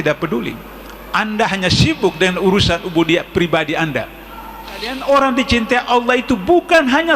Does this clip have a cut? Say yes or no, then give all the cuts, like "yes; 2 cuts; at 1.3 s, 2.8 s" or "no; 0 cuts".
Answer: yes; 1 cut; at 5.0 s